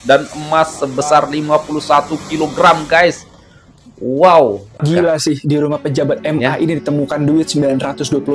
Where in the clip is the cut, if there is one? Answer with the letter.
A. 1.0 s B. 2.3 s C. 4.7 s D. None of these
C